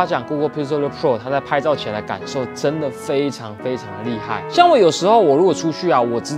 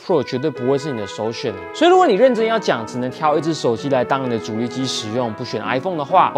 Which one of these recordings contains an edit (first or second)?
second